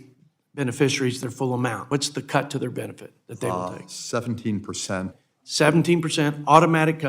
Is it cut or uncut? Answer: cut